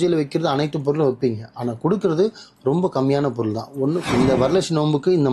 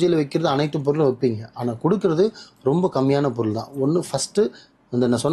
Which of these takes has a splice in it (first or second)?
first